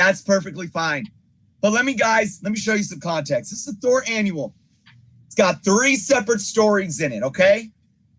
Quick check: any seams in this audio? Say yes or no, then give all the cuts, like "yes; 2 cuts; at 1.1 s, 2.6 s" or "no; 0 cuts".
no; 0 cuts